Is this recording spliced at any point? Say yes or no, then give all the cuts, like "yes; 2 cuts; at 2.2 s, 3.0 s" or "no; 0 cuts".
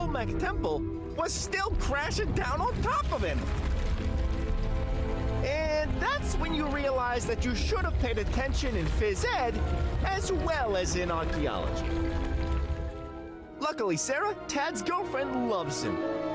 no; 0 cuts